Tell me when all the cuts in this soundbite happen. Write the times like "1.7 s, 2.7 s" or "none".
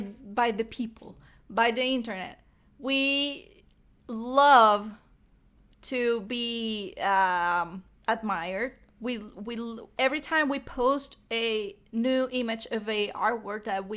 none